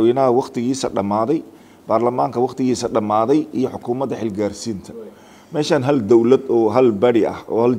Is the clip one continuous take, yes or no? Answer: yes